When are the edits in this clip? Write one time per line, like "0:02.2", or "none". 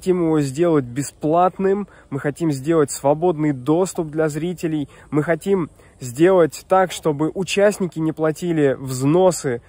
none